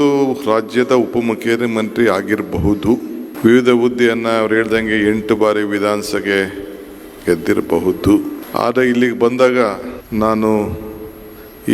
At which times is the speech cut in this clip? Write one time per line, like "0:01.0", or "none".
0:03.2
0:08.4
0:09.9

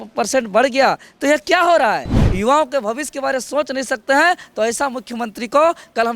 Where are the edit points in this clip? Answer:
0:02.2

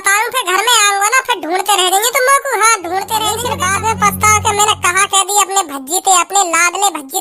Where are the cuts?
0:03.4

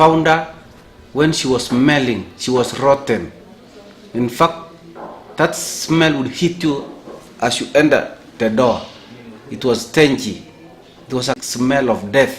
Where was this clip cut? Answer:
0:11.4

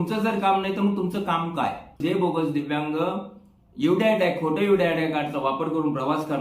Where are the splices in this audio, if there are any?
0:02.0

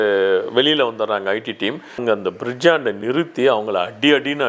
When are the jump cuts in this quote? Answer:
0:02.0

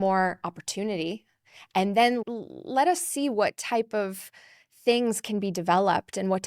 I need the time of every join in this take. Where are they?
0:02.2

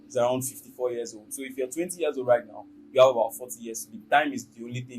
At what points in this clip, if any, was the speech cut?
0:03.9

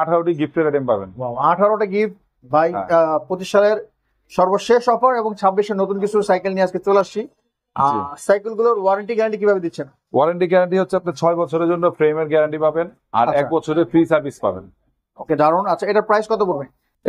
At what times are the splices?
none

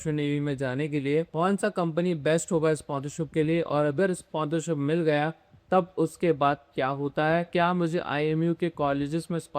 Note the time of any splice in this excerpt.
0:01.3
0:07.5

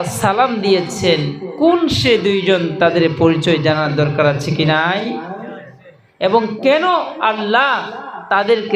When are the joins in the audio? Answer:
none

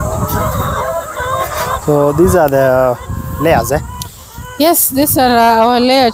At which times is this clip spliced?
none

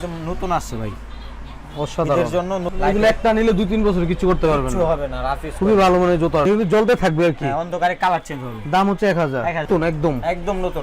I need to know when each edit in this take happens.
0:02.7
0:06.5
0:09.7

